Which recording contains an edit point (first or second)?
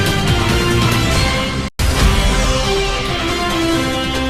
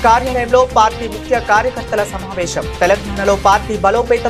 first